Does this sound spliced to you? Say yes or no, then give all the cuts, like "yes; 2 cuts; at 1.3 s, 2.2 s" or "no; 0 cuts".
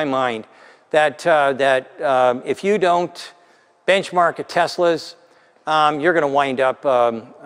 no; 0 cuts